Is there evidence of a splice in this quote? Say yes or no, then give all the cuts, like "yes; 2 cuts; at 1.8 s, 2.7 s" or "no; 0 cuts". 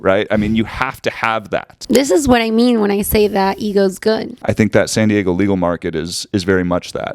yes; 2 cuts; at 1.7 s, 4.3 s